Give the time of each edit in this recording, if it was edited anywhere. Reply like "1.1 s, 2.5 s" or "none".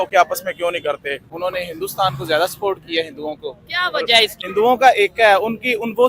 1.2 s, 4.4 s

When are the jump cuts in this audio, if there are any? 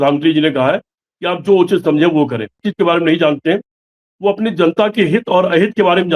2.6 s

